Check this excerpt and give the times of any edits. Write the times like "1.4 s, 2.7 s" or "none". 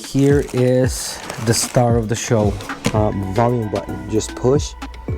2.9 s